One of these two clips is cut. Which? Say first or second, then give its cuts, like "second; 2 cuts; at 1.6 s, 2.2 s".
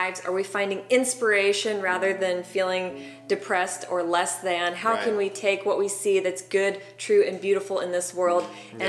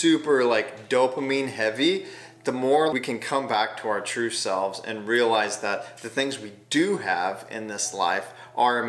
second; 1 cut; at 2.9 s